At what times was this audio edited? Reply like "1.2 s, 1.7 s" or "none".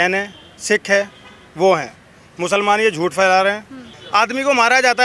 3.9 s